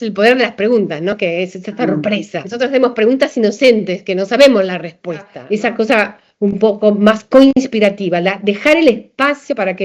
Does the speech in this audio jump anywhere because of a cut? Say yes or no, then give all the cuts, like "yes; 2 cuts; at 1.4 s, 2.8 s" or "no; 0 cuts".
yes; 3 cuts; at 2.4 s, 4.3 s, 5.4 s